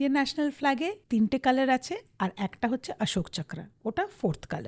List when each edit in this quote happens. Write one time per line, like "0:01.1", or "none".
0:01.0